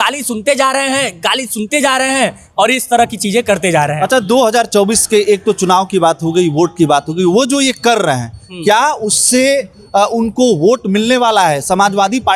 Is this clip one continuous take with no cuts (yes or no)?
yes